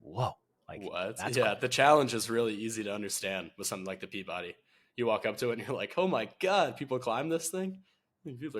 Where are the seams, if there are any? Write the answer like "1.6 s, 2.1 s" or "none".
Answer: none